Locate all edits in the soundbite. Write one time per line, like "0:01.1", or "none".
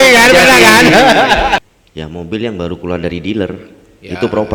0:01.6